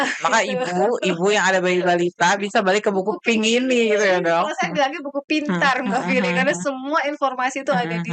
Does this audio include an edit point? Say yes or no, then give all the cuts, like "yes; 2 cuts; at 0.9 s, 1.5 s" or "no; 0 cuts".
no; 0 cuts